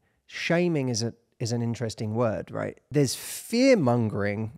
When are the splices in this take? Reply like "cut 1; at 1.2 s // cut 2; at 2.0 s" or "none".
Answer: cut 1; at 2.8 s